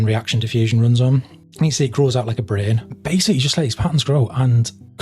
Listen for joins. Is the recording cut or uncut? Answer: cut